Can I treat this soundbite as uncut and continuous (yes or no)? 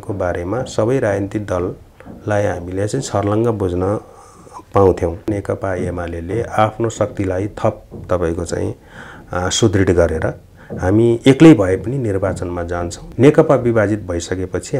no